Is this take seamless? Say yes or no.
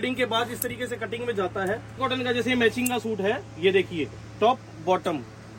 no